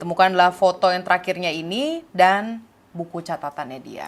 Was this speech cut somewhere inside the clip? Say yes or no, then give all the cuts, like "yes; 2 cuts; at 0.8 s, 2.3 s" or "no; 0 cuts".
no; 0 cuts